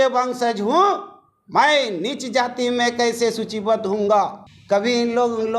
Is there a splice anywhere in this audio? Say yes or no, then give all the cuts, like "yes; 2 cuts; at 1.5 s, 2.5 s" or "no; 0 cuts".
yes; 1 cut; at 4.5 s